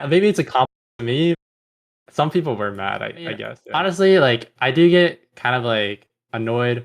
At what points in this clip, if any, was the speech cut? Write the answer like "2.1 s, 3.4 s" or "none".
3.5 s